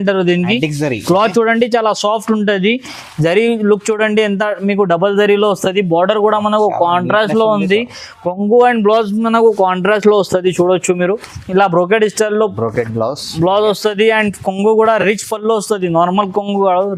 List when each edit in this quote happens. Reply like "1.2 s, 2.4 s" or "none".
none